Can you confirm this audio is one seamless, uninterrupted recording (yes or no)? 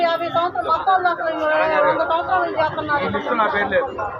yes